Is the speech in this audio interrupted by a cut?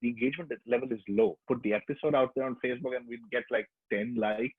yes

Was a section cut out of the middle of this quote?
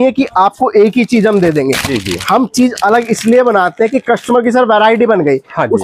no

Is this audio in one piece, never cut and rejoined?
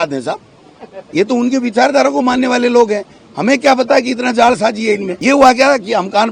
no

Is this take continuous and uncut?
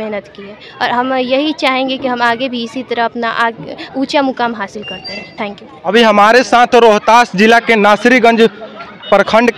no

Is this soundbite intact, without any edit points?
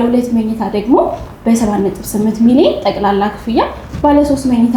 yes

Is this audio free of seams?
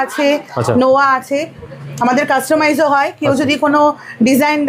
yes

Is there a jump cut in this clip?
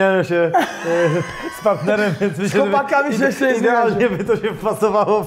no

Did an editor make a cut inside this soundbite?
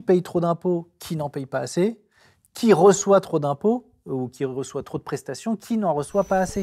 no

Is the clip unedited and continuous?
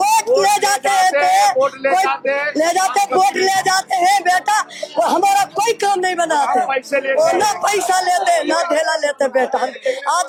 yes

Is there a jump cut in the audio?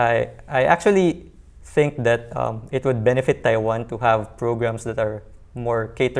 no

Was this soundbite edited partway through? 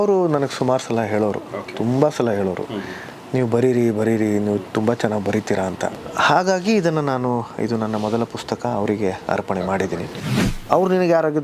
yes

